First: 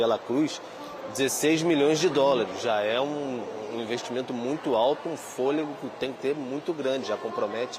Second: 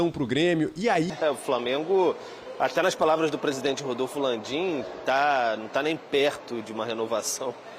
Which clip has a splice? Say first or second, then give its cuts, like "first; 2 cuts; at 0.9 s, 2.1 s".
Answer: second; 1 cut; at 1.1 s